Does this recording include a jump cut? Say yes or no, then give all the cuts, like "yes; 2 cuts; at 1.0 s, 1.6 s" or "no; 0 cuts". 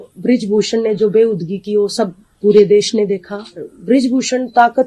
yes; 1 cut; at 3.7 s